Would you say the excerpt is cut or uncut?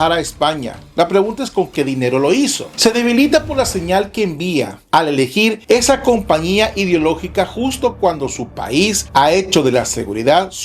uncut